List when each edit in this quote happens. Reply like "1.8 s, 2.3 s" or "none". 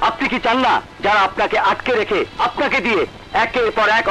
0.9 s, 2.3 s